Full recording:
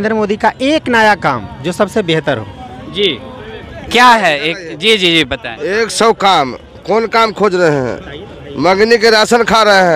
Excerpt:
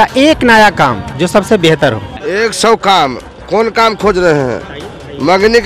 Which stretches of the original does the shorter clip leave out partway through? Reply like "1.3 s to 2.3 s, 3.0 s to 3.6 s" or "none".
2.6 s to 5.5 s